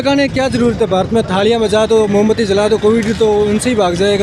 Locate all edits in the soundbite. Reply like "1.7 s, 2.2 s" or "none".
none